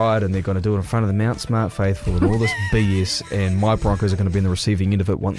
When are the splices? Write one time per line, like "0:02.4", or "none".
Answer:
none